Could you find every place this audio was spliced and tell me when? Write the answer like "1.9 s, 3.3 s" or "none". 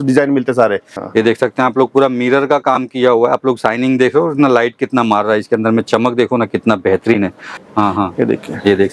0.9 s, 7.6 s